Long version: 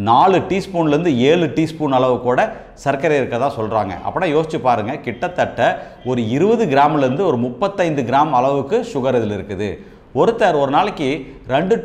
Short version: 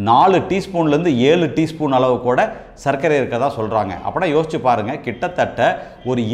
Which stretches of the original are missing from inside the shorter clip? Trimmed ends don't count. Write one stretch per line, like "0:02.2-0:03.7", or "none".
none

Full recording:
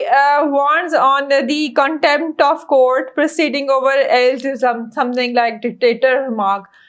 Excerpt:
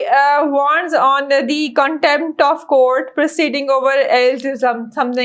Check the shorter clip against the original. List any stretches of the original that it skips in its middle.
none

